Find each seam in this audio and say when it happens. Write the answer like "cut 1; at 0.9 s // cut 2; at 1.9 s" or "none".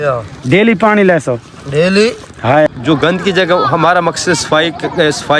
cut 1; at 2.7 s